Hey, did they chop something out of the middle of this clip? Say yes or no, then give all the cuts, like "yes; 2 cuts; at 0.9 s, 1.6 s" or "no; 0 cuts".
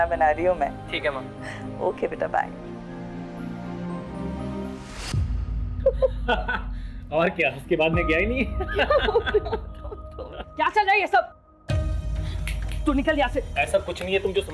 yes; 1 cut; at 4.8 s